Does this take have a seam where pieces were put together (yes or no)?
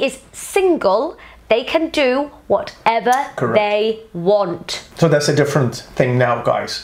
no